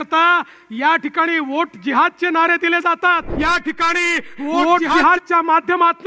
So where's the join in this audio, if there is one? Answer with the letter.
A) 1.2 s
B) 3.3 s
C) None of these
B